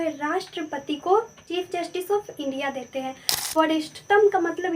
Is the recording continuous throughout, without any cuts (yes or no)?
no